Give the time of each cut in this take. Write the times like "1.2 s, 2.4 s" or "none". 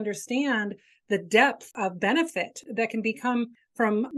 1.7 s, 2.6 s